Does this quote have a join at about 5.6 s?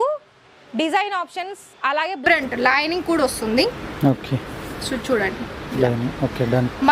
no; 1 cut; at 2.2 s

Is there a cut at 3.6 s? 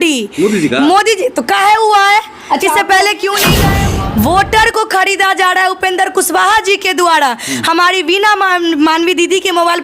yes; 1 cut; at 3.6 s

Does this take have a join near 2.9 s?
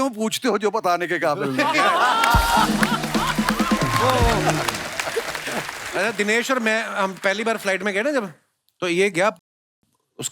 no; 1 cut; at 5.8 s

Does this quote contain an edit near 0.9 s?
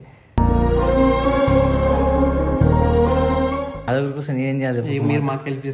no; 1 cut; at 3.8 s

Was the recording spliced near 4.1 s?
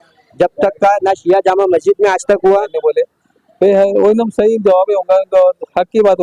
no; 1 cut; at 2.7 s

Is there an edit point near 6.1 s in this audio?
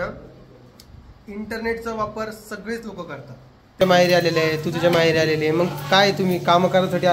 no; 1 cut; at 3.8 s

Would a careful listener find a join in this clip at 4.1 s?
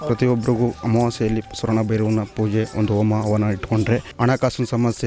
yes; 1 cut; at 4.1 s

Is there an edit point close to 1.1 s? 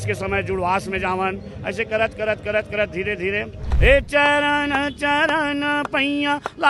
no; 1 cut; at 3.6 s

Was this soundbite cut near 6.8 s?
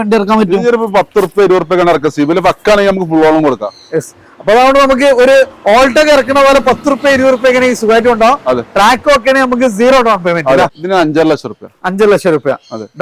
no; 1 cut; at 10.8 s

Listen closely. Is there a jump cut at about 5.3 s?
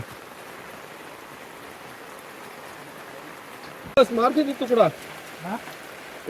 no; 1 cut; at 4.0 s

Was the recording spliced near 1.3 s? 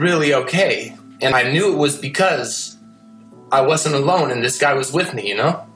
yes; 1 cut; at 1.3 s

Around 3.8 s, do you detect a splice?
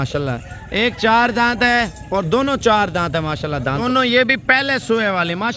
yes; 1 cut; at 3.8 s

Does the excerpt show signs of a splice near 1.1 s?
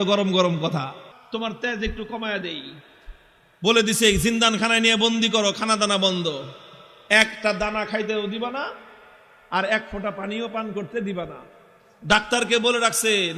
yes; 1 cut; at 1.1 s

